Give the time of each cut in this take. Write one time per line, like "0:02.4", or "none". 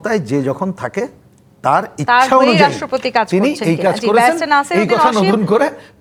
none